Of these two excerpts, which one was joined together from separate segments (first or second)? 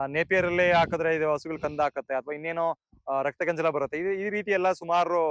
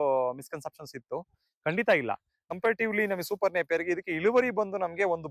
second